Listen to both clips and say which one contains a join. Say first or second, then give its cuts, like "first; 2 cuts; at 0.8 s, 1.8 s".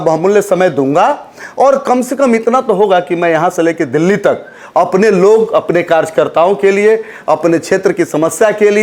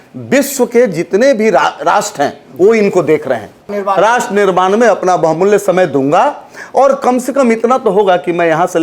second; 1 cut; at 3.7 s